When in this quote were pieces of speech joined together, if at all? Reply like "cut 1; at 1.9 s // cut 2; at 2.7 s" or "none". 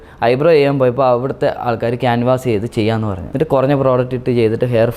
cut 1; at 3.2 s